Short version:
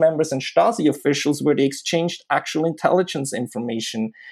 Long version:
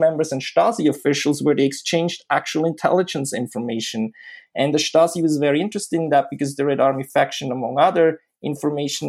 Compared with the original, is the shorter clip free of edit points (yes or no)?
yes